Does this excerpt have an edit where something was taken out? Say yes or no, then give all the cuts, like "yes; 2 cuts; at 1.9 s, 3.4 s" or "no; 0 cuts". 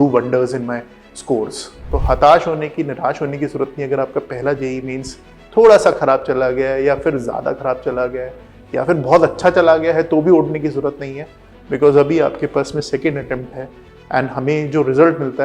yes; 1 cut; at 1.7 s